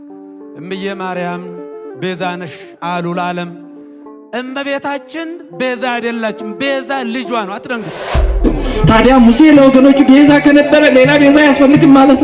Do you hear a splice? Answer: yes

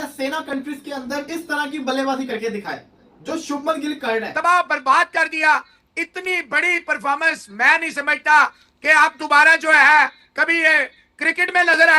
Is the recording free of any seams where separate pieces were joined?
no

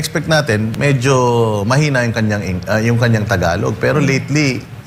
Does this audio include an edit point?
no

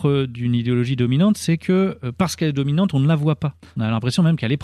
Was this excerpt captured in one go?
no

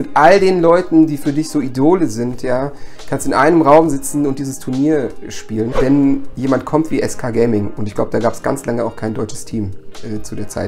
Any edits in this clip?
yes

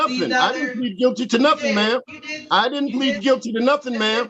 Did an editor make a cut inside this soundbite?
no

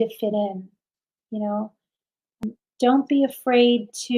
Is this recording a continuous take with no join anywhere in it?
no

